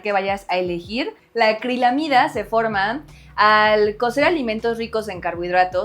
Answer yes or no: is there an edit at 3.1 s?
no